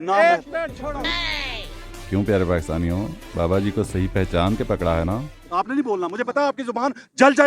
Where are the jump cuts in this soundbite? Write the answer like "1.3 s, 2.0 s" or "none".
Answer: 1.1 s, 5.4 s